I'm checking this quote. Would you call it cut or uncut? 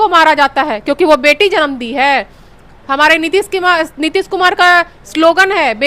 uncut